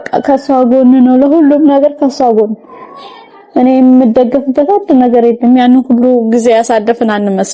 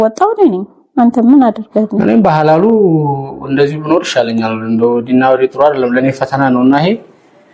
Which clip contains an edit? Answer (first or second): second